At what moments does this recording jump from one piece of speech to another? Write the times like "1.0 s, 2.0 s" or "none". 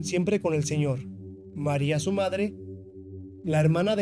none